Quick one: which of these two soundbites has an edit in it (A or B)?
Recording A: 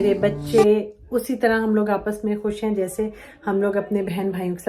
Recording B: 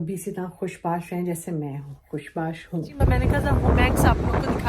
B